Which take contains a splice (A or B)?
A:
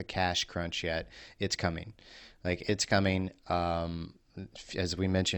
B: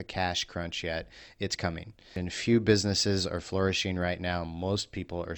B